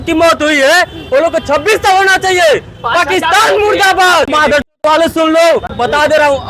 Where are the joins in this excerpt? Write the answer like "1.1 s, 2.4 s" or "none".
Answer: 4.3 s, 5.7 s

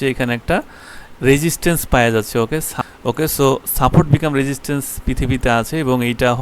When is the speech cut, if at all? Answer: 2.7 s

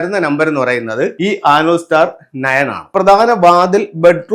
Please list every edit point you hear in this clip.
1.1 s, 2.9 s

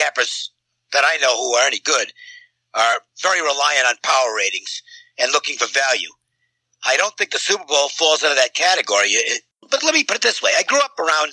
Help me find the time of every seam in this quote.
9.5 s

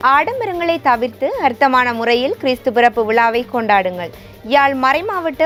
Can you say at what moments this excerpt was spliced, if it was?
none

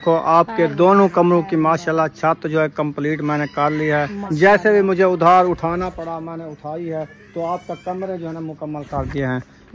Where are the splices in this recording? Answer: 4.2 s

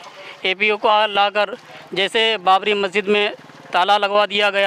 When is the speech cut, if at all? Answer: none

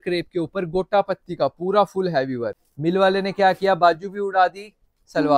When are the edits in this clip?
2.6 s

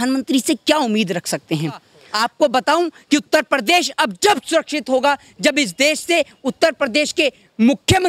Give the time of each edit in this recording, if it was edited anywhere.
2.0 s

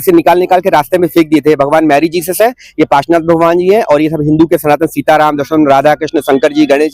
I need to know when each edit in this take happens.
none

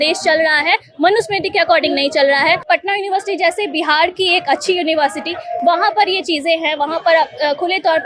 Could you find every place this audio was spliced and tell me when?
2.6 s

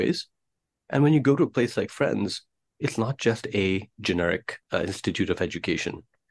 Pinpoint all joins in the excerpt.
4.5 s

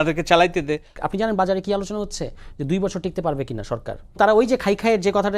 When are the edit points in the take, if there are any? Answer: 0.9 s, 4.2 s

